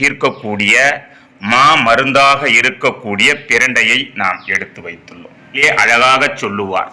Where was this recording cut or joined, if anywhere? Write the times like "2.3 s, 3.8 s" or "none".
5.6 s